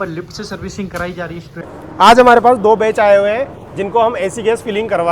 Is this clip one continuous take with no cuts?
no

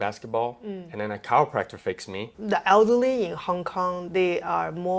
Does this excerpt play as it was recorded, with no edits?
no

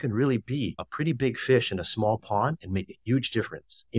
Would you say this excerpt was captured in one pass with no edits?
yes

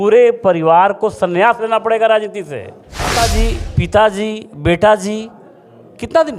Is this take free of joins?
no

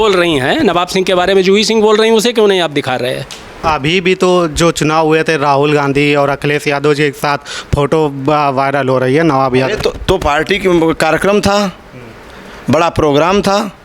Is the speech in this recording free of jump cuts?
no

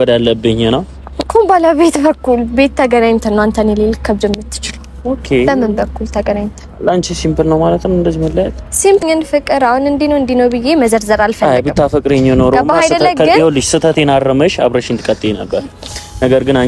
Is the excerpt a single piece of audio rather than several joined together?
no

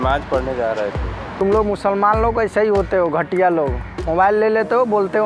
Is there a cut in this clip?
yes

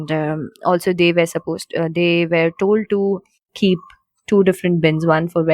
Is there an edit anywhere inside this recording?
no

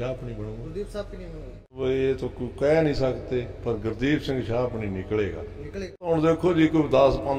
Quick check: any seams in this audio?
yes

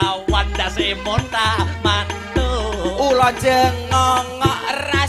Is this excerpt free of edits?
yes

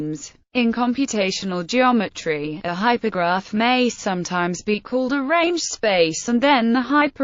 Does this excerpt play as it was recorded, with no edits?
yes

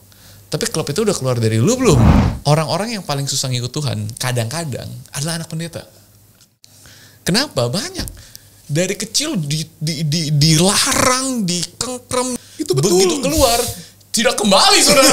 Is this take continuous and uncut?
no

